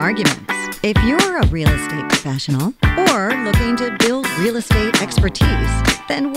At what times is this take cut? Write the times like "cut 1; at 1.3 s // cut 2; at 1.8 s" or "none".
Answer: none